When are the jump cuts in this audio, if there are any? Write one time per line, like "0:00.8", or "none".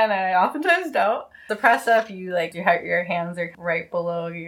0:01.5
0:02.5
0:03.5